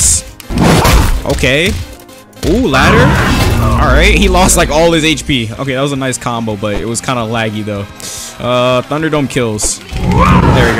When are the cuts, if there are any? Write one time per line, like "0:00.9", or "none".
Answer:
none